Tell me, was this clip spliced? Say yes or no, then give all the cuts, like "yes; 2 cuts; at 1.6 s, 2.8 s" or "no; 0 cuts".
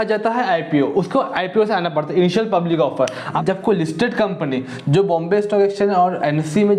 yes; 1 cut; at 3.4 s